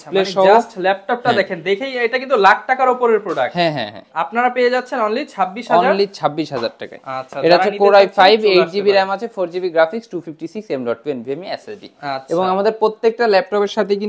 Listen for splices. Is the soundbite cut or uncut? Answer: uncut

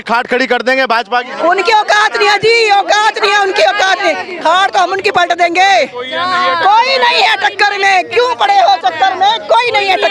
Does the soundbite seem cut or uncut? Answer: uncut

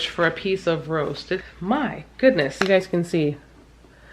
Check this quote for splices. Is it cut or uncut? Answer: cut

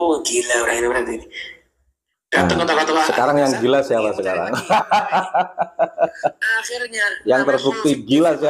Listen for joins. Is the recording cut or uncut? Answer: uncut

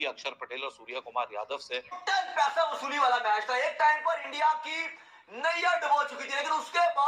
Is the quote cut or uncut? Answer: cut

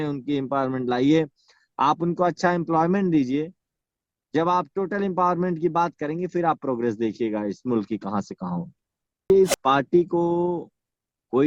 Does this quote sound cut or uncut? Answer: cut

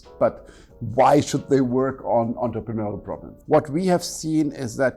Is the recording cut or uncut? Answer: cut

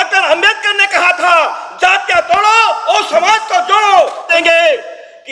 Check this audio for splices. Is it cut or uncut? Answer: cut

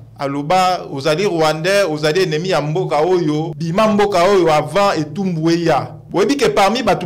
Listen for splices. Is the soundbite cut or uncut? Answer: cut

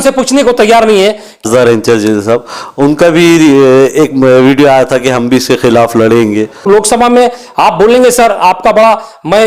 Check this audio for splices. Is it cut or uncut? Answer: cut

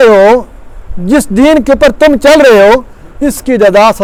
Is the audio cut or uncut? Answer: uncut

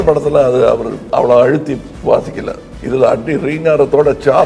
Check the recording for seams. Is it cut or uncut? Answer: cut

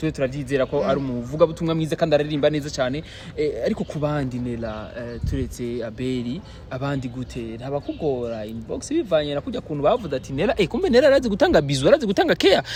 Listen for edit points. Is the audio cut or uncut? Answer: uncut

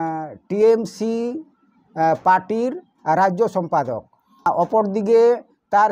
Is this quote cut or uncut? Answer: cut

